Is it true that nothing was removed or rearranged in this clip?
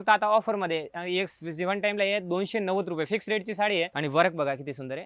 no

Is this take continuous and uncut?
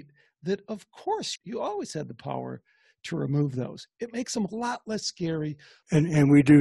no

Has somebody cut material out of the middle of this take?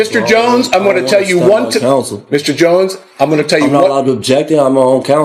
no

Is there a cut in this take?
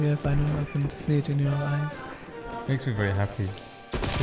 no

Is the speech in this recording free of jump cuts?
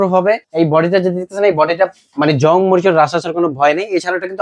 yes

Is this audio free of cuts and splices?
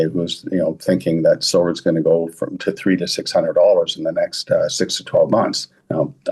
yes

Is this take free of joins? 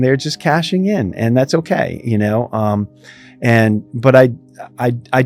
yes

